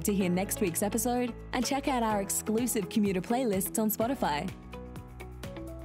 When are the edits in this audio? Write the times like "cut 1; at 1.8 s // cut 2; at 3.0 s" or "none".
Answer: none